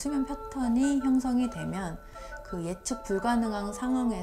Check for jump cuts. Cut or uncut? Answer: cut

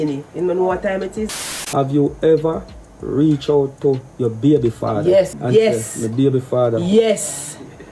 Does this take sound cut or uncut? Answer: cut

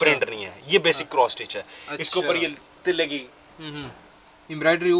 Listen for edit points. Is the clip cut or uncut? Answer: uncut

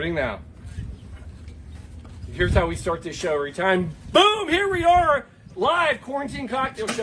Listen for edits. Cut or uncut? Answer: uncut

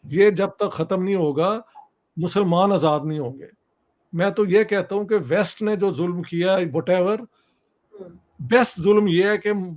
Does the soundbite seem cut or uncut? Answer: uncut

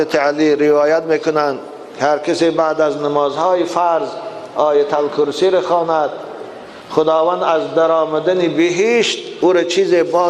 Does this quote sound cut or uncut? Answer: uncut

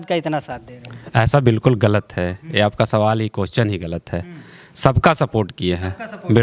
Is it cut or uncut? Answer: uncut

